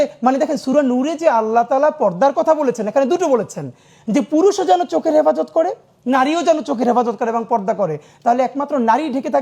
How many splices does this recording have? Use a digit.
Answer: 0